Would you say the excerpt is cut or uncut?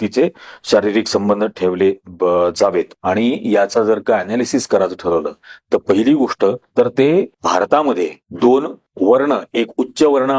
cut